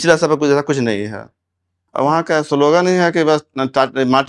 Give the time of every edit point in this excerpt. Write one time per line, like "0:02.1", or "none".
0:01.8

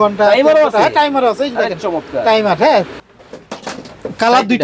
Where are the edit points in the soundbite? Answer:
0:03.0

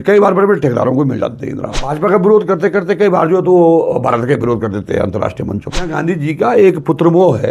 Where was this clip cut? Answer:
0:01.9
0:05.9

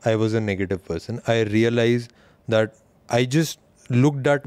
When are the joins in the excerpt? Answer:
none

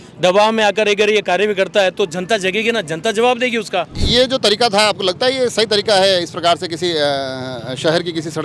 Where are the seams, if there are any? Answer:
0:04.0

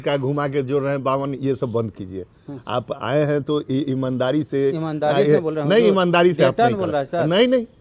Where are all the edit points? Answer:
none

